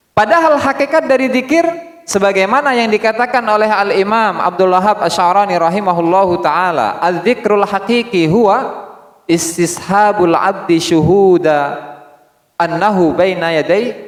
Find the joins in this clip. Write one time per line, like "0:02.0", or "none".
none